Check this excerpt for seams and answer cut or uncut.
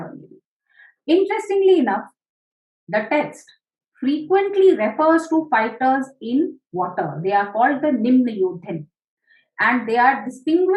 uncut